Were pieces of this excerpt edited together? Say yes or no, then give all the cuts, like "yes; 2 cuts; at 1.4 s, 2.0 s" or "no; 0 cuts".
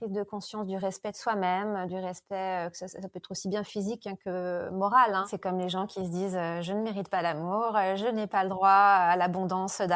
yes; 1 cut; at 5.3 s